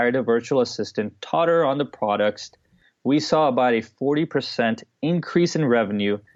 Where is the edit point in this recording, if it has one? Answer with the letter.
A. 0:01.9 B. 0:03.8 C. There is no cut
C